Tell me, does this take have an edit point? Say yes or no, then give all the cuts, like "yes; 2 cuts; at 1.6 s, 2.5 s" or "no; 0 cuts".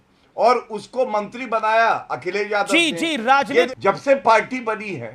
yes; 1 cut; at 3.7 s